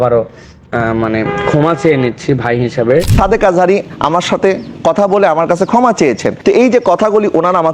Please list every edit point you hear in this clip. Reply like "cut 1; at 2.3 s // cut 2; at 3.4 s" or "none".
cut 1; at 3.1 s